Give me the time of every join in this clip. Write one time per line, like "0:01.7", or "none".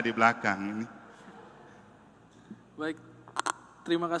none